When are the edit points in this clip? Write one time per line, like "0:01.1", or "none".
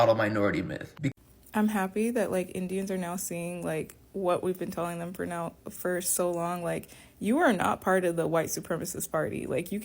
0:00.9